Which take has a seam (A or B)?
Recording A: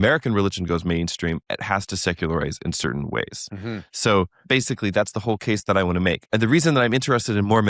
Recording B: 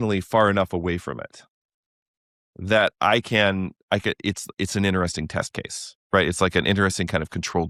A